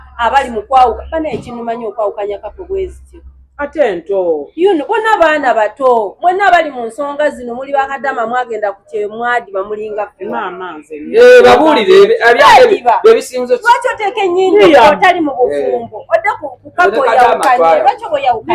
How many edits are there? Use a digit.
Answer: 0